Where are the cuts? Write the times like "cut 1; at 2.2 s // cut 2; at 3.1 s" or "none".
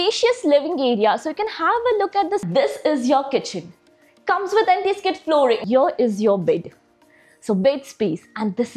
cut 1; at 2.5 s // cut 2; at 5.6 s

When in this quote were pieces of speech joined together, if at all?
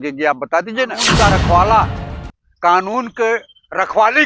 cut 1; at 1.0 s

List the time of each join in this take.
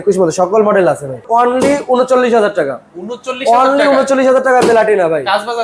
cut 1; at 1.2 s

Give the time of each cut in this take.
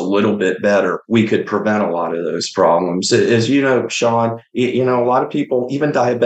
cut 1; at 1.0 s // cut 2; at 4.4 s

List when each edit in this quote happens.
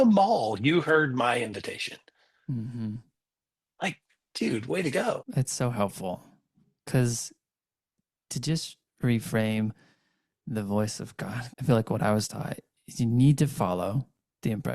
cut 1; at 5.2 s // cut 2; at 11.5 s

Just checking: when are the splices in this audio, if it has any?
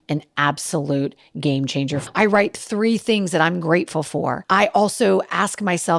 cut 1; at 2.0 s // cut 2; at 4.4 s

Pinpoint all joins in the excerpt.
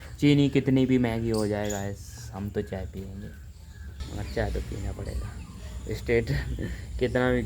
cut 1; at 3.9 s

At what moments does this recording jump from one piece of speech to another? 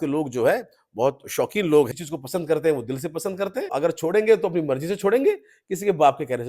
cut 1; at 1.9 s // cut 2; at 3.7 s

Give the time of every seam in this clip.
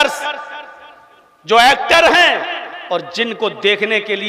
none

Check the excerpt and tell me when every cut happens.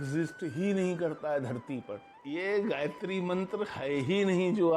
cut 1; at 2.1 s

